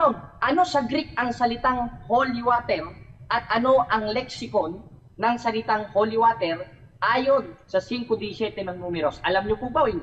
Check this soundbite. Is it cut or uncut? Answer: uncut